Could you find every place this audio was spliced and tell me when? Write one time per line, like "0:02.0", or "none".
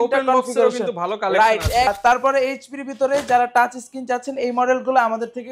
0:01.9